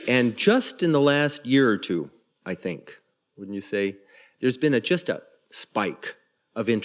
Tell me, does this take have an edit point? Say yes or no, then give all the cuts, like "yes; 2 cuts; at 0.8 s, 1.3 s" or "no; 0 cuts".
yes; 1 cut; at 5.6 s